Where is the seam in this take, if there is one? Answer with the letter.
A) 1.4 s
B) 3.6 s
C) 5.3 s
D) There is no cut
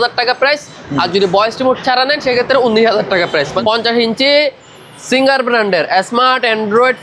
B